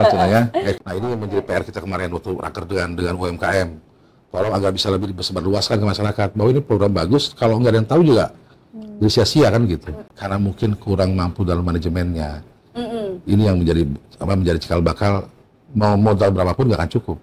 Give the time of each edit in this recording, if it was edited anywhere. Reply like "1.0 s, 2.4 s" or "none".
0.8 s, 10.0 s